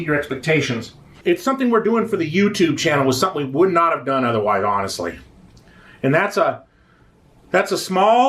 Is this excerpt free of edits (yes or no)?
no